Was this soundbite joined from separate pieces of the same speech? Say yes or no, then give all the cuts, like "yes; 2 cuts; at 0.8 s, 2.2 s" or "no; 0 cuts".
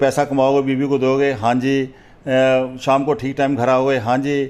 no; 0 cuts